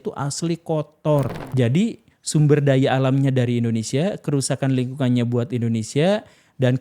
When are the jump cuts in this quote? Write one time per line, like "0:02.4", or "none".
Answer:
0:01.4